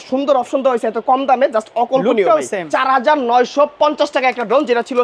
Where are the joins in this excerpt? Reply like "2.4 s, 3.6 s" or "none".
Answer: 2.7 s